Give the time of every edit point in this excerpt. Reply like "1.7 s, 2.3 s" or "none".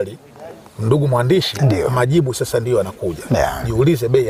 none